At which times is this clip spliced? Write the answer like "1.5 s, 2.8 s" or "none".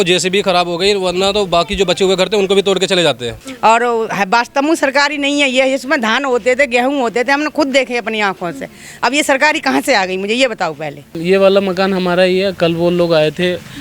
3.4 s, 11.1 s